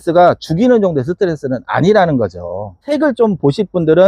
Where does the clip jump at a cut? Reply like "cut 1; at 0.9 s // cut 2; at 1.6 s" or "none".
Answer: cut 1; at 2.8 s